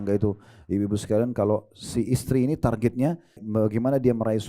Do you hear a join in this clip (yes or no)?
yes